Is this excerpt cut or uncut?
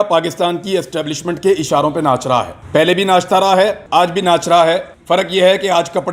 cut